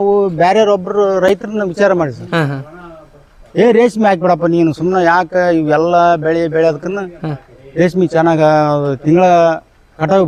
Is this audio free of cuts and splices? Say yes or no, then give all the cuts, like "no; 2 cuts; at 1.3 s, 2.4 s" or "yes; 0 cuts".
yes; 0 cuts